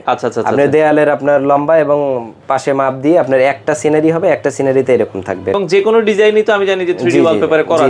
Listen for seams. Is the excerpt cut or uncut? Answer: cut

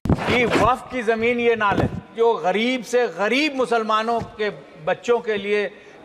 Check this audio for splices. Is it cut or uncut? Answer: cut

